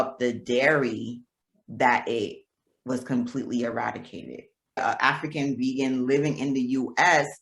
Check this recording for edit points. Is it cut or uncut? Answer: cut